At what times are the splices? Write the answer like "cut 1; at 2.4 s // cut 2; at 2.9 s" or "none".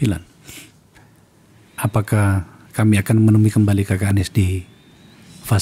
none